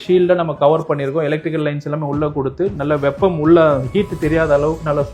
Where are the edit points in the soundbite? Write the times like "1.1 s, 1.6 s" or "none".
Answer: none